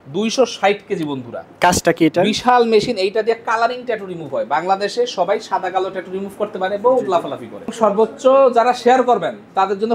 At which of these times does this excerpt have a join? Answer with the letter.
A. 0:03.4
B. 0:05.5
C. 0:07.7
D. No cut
C